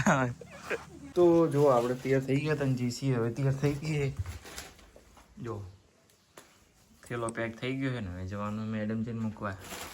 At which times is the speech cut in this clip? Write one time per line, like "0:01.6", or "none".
0:01.0